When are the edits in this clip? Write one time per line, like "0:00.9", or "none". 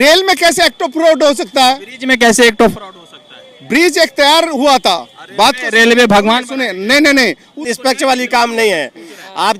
0:07.6